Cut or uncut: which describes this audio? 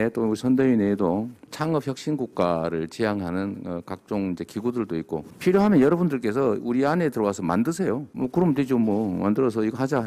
uncut